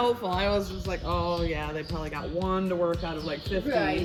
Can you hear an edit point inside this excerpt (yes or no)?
no